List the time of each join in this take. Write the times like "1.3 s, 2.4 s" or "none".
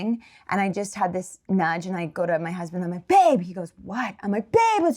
none

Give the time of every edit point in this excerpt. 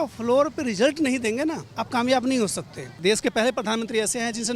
1.7 s, 2.8 s

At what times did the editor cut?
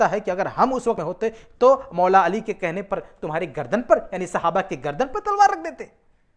1.0 s

